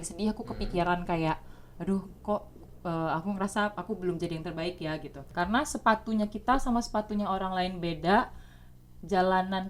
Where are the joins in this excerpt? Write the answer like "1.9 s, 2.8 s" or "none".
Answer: 5.2 s